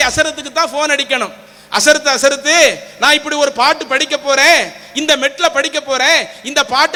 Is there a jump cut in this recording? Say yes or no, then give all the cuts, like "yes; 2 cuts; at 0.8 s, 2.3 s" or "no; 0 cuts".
no; 0 cuts